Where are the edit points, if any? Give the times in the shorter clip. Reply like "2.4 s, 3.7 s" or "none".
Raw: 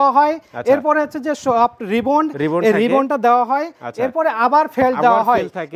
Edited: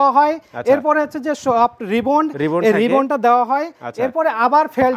none